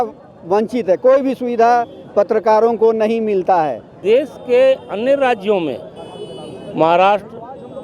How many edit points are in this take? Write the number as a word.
one